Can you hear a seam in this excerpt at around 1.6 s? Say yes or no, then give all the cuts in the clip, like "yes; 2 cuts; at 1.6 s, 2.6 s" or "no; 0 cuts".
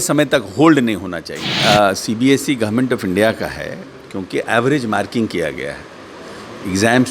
yes; 1 cut; at 1.6 s